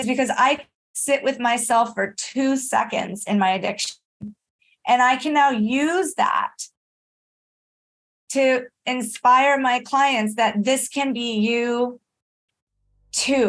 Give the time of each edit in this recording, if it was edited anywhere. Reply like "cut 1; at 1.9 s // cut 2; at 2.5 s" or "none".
none